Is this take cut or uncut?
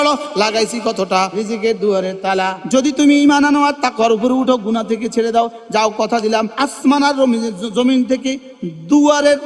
cut